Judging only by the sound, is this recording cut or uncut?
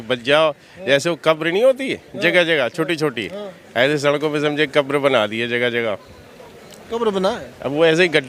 uncut